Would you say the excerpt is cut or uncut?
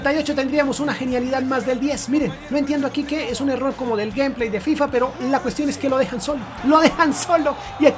uncut